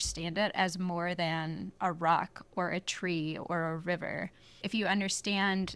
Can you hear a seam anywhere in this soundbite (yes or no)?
yes